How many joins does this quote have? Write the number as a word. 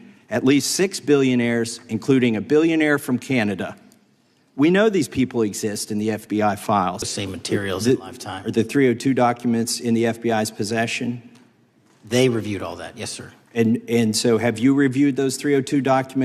one